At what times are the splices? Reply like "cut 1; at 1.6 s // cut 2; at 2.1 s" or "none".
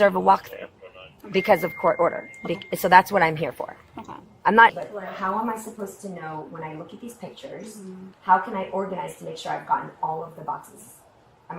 cut 1; at 4.7 s